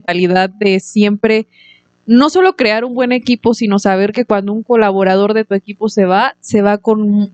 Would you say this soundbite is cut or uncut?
uncut